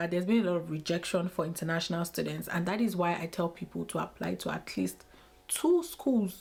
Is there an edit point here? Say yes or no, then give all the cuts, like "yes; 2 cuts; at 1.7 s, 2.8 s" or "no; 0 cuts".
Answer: no; 0 cuts